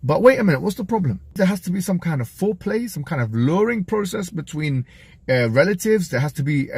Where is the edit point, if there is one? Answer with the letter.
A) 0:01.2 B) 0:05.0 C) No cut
A